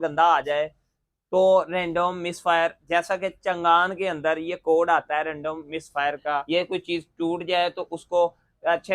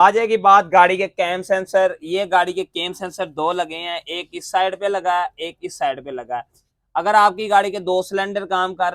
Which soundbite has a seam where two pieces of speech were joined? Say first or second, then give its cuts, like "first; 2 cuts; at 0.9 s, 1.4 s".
first; 1 cut; at 6.4 s